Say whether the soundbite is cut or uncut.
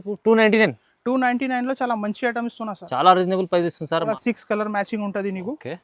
cut